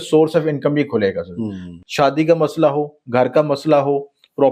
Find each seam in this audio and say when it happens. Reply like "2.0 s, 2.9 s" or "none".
1.6 s